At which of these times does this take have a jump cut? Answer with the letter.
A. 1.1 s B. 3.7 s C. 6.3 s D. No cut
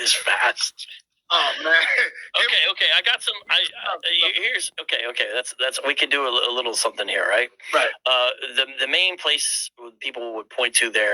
B